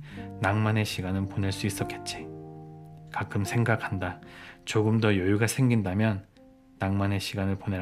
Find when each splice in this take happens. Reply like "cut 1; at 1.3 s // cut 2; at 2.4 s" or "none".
cut 1; at 1.8 s // cut 2; at 3.1 s